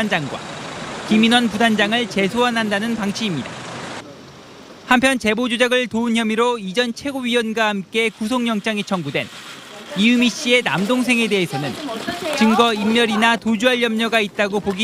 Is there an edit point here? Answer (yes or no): no